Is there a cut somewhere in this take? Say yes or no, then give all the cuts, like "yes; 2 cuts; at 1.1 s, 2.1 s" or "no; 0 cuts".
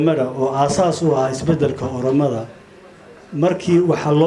no; 0 cuts